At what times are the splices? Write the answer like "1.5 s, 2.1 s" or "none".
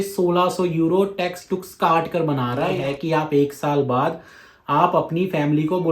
2.7 s